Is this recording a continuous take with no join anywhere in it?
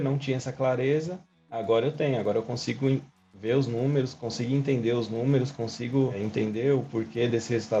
yes; 0 cuts

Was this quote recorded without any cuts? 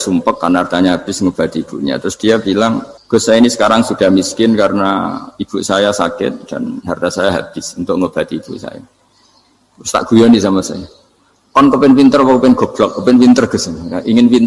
no; 1 cut; at 2.9 s

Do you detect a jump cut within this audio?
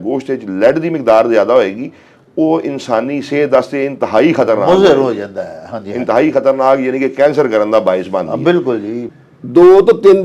yes; 1 cut; at 9.0 s

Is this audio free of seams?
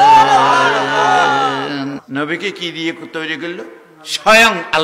no; 1 cut; at 2.0 s

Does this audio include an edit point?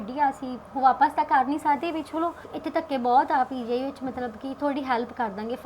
no; 0 cuts

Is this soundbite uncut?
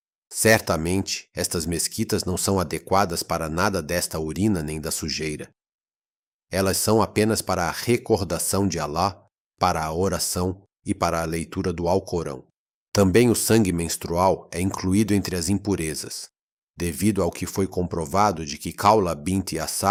yes; 0 cuts

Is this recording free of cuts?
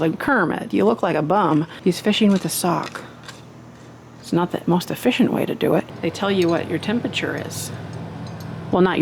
no; 2 cuts; at 1.7 s, 5.9 s

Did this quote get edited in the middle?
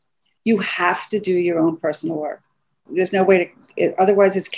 yes; 1 cut; at 2.8 s

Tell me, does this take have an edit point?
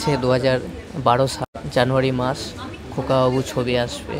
yes; 1 cut; at 1.6 s

